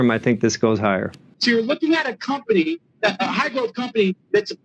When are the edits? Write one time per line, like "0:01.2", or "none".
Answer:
0:01.2

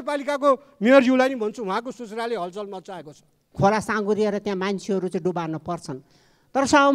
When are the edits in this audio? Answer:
0:03.4

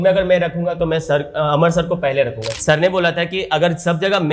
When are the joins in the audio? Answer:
0:02.5

